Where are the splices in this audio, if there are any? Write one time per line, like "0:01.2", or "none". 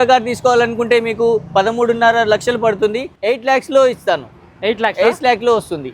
0:03.1